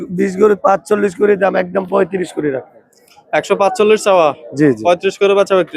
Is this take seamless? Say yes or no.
yes